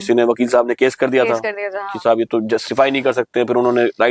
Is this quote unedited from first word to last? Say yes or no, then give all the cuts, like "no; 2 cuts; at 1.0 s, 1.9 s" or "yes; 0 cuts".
yes; 0 cuts